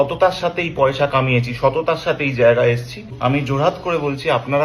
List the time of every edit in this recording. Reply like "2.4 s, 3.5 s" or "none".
3.1 s